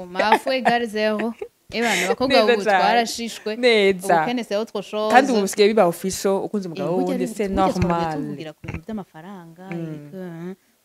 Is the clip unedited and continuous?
yes; 0 cuts

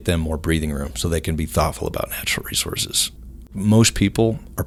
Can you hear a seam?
no; 0 cuts

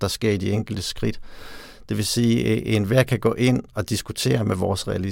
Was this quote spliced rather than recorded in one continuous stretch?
no; 0 cuts

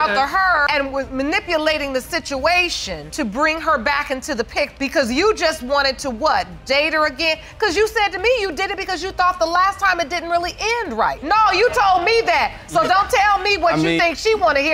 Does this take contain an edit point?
no; 0 cuts

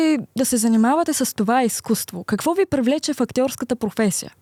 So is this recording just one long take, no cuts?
yes; 0 cuts

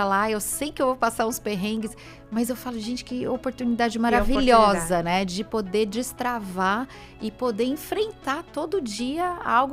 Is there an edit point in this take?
no; 0 cuts

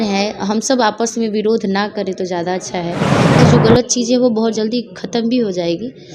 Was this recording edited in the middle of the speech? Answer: yes; 1 cut; at 3.4 s

